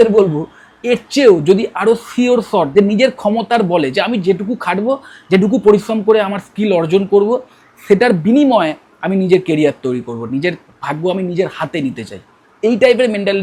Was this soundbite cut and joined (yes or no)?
no